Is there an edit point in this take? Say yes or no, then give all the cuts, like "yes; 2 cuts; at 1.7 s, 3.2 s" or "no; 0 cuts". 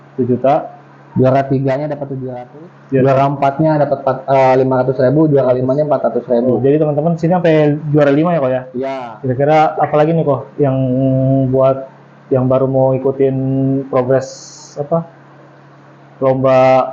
yes; 2 cuts; at 2.2 s, 8.8 s